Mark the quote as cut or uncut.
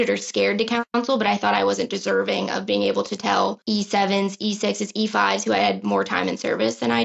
cut